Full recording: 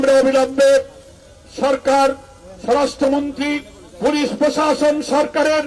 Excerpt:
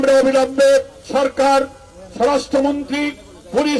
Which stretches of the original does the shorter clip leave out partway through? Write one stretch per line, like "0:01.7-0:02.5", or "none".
0:01.0-0:01.5